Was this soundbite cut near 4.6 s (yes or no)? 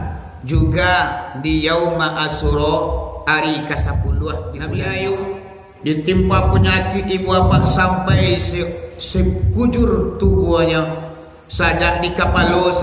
yes